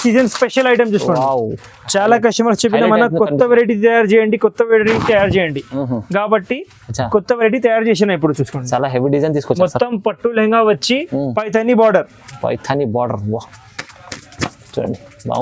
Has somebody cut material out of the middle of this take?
no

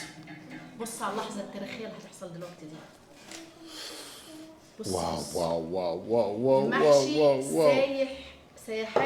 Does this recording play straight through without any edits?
yes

